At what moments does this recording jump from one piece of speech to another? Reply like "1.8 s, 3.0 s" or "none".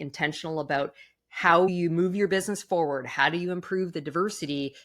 1.7 s

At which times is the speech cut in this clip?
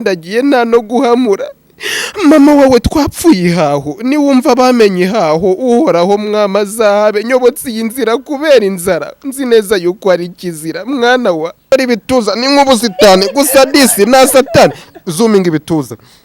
11.7 s

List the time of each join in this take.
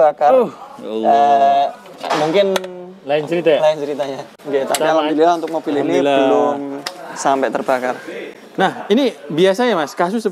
none

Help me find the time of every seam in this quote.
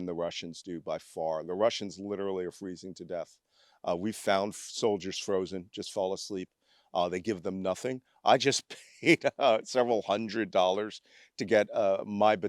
none

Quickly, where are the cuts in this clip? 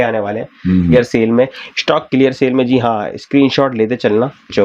0.9 s

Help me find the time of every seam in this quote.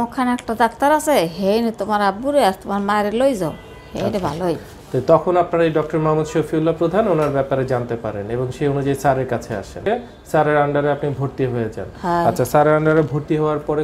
9.9 s

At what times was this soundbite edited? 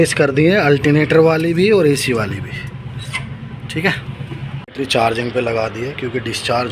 4.6 s

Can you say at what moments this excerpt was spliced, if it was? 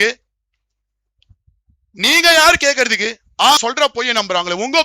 3.6 s

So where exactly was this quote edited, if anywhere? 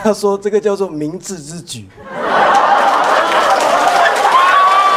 none

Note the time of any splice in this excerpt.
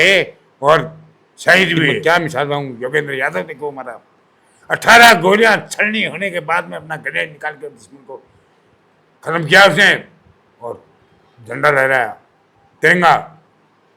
2.0 s

